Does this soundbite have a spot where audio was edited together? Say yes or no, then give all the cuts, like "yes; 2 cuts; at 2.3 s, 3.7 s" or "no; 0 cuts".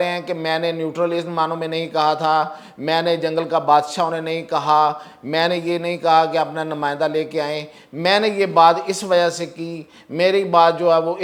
no; 0 cuts